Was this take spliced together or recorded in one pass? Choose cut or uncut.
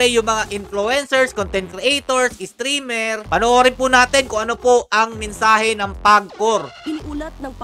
cut